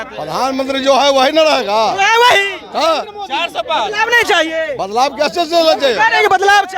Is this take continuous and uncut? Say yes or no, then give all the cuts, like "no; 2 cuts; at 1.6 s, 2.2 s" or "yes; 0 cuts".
yes; 0 cuts